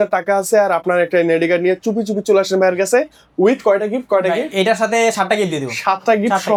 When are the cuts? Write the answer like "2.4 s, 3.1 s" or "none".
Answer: none